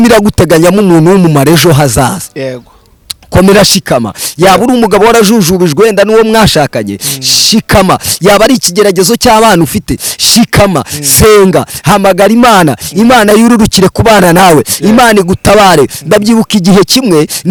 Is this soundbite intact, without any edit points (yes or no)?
yes